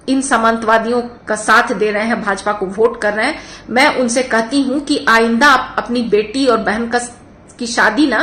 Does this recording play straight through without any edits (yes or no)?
yes